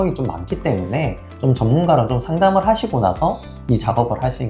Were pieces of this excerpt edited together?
no; 0 cuts

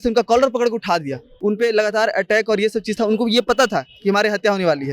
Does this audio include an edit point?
yes; 1 cut; at 1.3 s

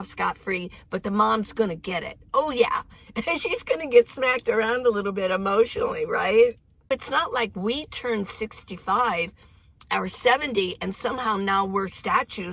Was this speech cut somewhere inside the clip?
yes; 1 cut; at 6.9 s

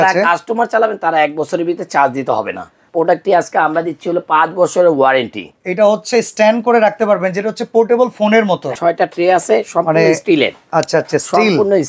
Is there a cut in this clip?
yes; 3 cuts; at 2.8 s, 5.5 s, 8.7 s

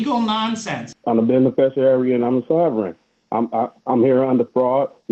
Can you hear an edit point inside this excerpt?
yes; 1 cut; at 0.9 s

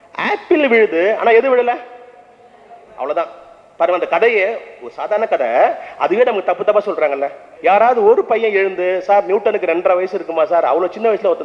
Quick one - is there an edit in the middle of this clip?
yes; 1 cut; at 7.5 s

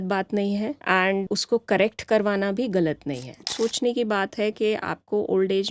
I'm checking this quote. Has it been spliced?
yes; 2 cuts; at 1.2 s, 3.5 s

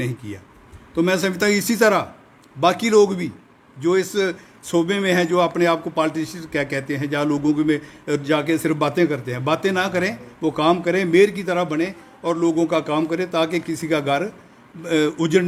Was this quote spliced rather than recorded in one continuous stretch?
no; 0 cuts

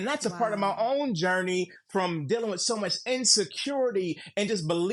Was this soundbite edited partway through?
no; 0 cuts

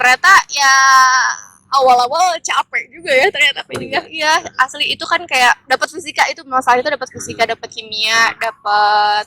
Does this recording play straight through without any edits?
yes; 0 cuts

